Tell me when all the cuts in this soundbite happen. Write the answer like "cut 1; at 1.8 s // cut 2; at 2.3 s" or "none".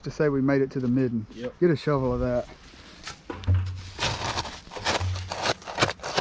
none